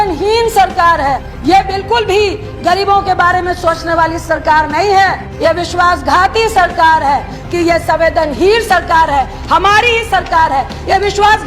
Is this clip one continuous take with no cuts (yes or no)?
no